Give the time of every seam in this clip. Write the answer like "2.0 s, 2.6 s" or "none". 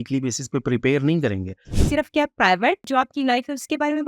1.7 s, 2.9 s